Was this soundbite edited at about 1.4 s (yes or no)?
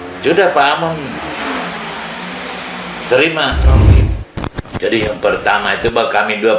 no